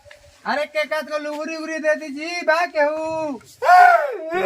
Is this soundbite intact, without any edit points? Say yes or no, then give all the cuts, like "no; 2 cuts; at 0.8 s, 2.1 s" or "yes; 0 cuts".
no; 1 cut; at 3.5 s